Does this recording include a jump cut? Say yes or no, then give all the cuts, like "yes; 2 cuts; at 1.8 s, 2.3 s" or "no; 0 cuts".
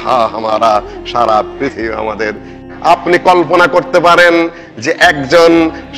yes; 1 cut; at 2.7 s